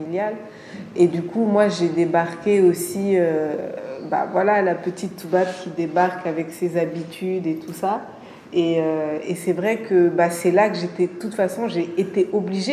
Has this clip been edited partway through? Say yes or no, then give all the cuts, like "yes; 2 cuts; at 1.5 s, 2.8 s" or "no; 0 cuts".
no; 0 cuts